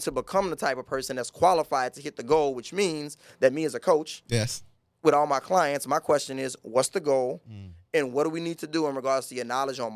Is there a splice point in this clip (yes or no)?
no